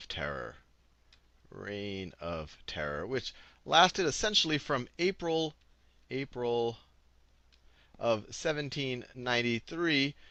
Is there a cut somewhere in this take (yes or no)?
no